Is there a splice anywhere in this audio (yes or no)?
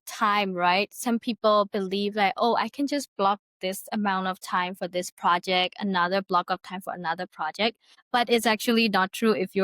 yes